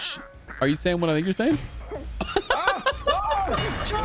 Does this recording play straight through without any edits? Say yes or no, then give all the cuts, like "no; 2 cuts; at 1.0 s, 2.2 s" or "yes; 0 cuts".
yes; 0 cuts